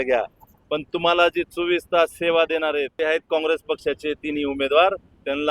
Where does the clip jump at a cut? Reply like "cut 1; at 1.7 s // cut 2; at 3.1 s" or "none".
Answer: cut 1; at 2.9 s